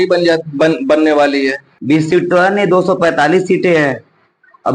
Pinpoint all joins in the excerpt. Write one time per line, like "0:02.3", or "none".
0:01.7